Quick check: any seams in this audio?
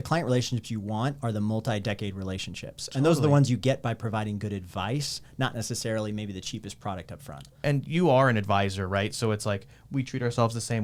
no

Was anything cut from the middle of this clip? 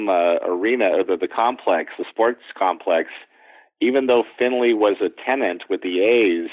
no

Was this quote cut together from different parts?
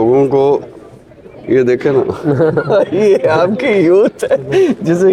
no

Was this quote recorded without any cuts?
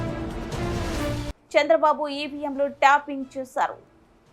no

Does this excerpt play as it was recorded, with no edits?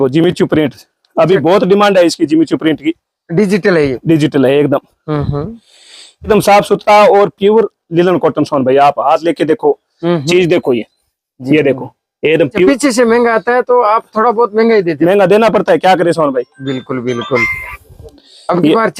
no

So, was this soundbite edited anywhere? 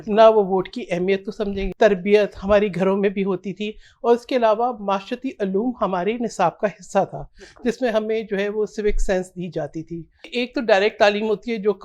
yes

